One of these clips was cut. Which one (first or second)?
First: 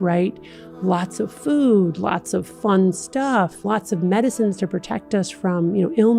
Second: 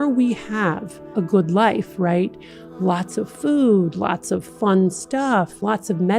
second